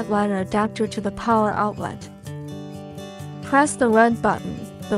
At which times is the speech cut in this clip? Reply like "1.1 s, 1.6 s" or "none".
2.1 s, 3.3 s